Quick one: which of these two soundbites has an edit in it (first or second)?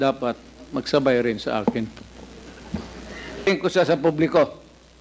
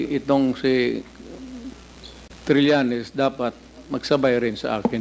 first